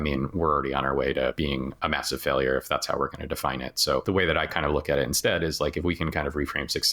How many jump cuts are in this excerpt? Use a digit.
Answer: 2